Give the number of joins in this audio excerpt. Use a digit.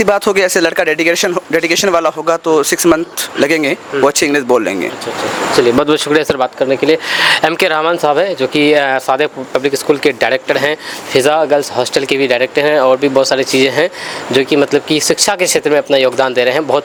0